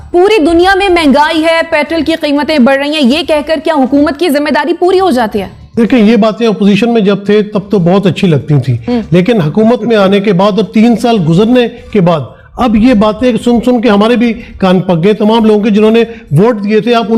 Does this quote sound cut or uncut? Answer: uncut